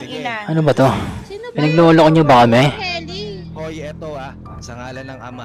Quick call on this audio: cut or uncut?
uncut